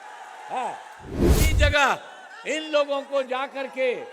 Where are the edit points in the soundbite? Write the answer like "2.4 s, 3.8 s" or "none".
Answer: 1.4 s